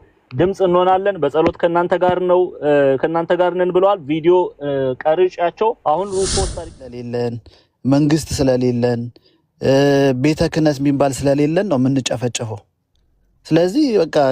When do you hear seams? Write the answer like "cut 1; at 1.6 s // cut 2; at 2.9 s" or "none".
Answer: cut 1; at 6.7 s